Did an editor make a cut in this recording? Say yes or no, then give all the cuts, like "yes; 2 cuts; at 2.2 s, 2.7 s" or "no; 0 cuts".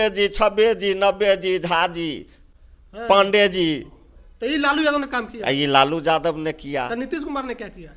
no; 0 cuts